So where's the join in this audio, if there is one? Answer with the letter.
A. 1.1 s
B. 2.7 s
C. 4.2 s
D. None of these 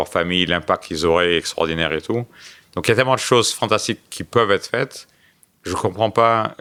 D